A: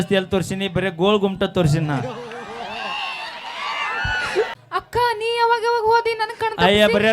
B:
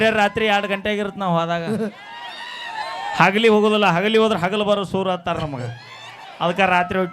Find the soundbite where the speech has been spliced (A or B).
A